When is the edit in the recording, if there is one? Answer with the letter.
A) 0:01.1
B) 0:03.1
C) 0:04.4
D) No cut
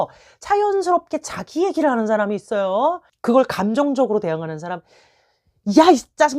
B